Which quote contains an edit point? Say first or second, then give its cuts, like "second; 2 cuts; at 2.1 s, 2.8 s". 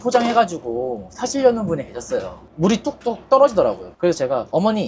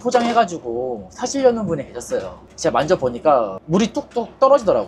first; 1 cut; at 2.5 s